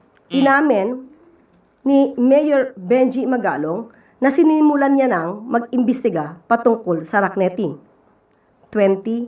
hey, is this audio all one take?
yes; 0 cuts

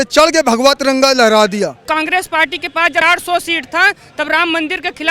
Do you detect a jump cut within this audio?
yes; 1 cut; at 1.9 s

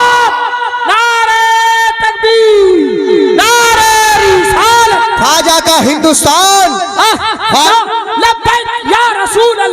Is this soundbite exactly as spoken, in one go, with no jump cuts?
no; 1 cut; at 7.7 s

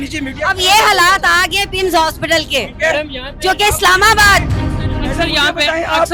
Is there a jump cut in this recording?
no; 0 cuts

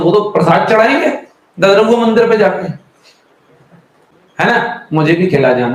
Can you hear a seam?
yes; 1 cut; at 4.1 s

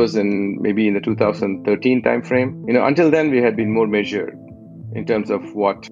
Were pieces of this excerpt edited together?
no; 0 cuts

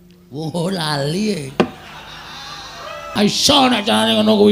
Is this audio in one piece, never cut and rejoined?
no; 1 cut; at 3.1 s

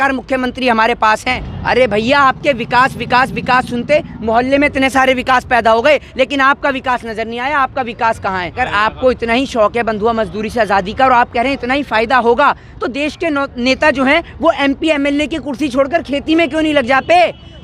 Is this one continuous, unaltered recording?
no; 2 cuts; at 1.4 s, 8.6 s

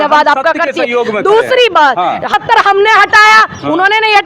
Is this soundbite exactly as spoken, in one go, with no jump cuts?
no; 1 cut; at 2.3 s

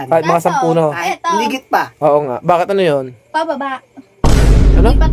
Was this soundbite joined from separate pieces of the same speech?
no; 0 cuts

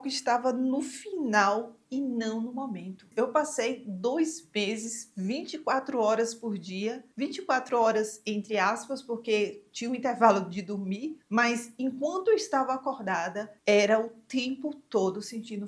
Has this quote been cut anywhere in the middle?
no; 0 cuts

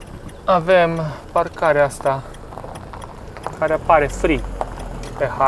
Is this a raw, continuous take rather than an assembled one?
yes; 0 cuts

